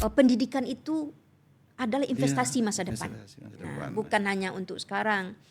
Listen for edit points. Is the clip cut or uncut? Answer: uncut